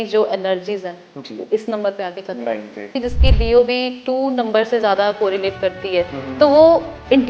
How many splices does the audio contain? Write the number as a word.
one